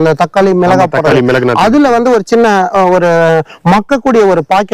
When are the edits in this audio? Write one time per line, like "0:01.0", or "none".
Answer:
none